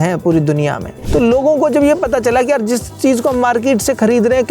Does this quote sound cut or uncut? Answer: cut